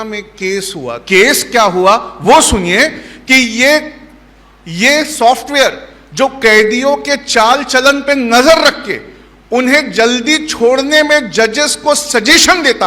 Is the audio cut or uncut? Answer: cut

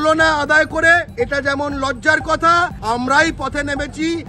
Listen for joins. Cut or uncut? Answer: cut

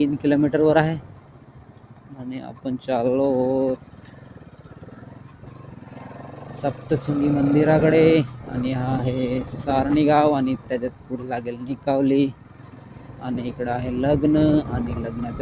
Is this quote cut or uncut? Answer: uncut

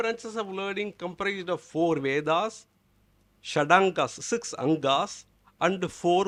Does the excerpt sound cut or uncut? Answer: uncut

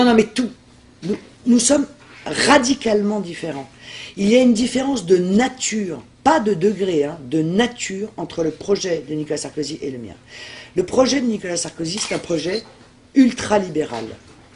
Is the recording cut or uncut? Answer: cut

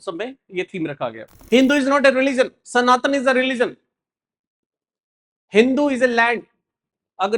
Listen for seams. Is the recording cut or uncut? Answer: cut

